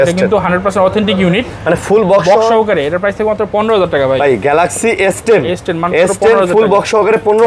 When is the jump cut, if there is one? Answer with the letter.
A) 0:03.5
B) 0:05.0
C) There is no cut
C